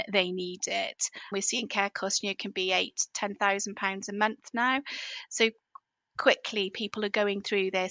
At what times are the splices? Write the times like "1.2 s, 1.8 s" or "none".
1.2 s